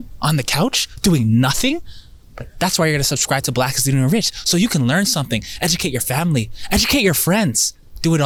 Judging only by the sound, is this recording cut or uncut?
uncut